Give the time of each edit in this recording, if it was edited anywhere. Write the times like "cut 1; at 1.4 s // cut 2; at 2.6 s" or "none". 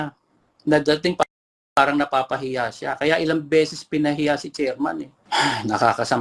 cut 1; at 5.1 s